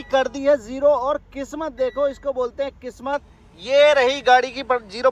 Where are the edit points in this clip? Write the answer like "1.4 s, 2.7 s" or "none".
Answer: none